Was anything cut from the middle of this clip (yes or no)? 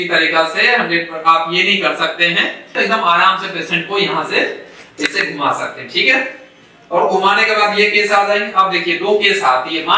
yes